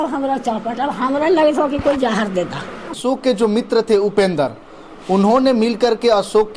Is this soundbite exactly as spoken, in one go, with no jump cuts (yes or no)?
no